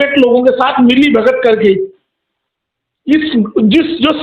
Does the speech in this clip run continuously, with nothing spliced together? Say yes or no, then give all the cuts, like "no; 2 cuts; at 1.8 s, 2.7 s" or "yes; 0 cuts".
yes; 0 cuts